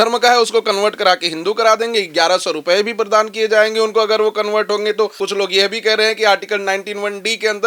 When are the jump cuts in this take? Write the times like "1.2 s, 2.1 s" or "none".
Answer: 5.2 s